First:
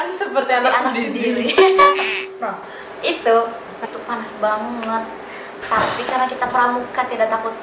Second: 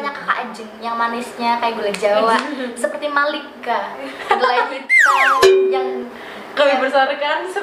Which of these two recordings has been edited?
first; 1 cut; at 3.8 s

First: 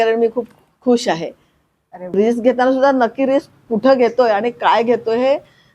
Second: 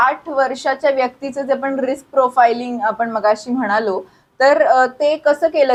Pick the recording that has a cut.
first; 1 cut; at 2.1 s

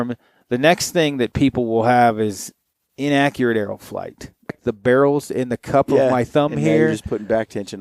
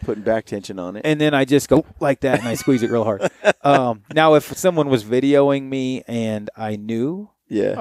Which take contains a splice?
first; 1 cut; at 4.5 s

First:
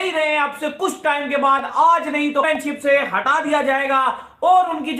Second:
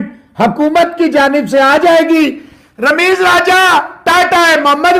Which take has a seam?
first; 1 cut; at 2.5 s

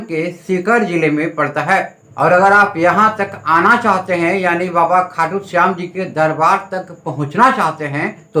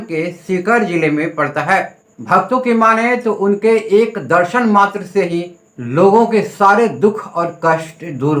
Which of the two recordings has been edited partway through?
second; 1 cut; at 2.0 s

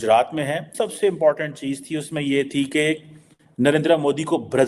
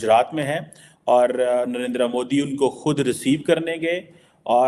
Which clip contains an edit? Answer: first; 1 cut; at 0.9 s

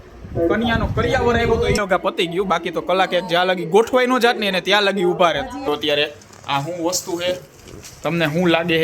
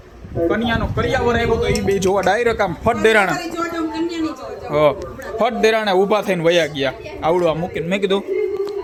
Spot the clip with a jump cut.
first; 2 cuts; at 1.8 s, 5.7 s

